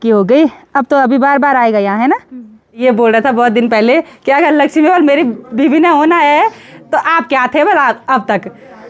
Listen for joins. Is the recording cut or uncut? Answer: cut